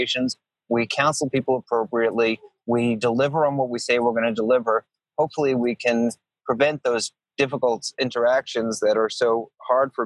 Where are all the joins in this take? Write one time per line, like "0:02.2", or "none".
none